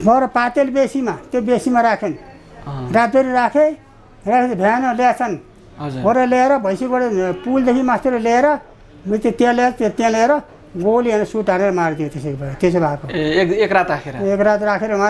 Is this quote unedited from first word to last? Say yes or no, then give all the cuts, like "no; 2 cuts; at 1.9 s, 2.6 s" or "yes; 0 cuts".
yes; 0 cuts